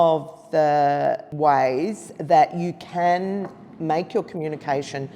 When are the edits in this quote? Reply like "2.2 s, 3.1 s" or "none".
1.3 s